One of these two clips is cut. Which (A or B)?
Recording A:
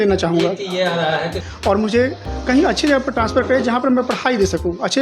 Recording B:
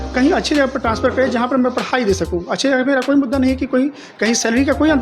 A